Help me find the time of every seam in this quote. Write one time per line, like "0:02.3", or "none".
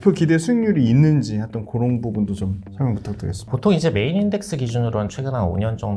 0:03.5